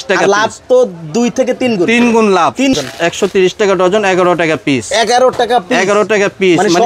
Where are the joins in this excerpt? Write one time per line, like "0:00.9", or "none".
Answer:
0:02.7